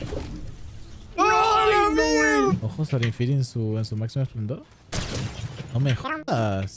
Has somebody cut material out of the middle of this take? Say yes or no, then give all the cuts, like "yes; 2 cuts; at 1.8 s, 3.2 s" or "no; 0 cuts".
yes; 1 cut; at 2.5 s